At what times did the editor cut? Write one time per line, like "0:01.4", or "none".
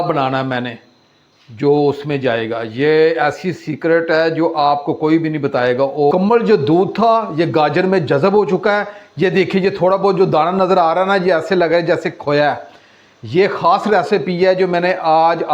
0:06.1